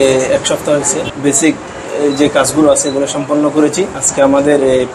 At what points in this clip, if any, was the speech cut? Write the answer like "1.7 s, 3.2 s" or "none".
1.1 s, 4.0 s